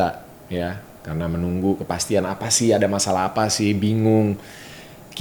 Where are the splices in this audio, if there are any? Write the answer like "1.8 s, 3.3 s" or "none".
none